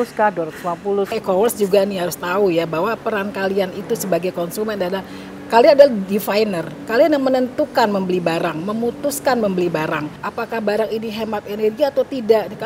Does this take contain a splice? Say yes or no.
yes